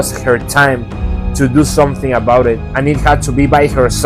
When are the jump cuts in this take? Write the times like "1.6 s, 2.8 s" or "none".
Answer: none